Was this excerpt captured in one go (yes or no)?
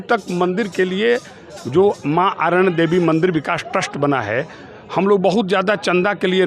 yes